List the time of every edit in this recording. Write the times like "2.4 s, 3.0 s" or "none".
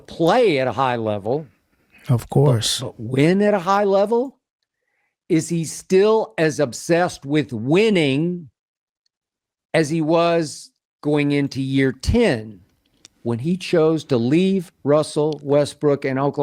none